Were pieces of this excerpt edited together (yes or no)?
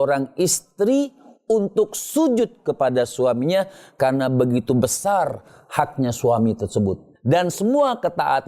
yes